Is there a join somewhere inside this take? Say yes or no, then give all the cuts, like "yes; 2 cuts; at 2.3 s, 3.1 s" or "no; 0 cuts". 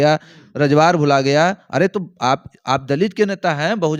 no; 0 cuts